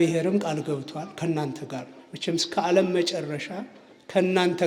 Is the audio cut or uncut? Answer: uncut